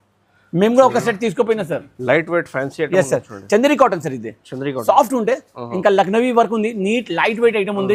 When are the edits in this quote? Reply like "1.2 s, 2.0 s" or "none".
none